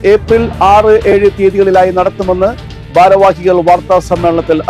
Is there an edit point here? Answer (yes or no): no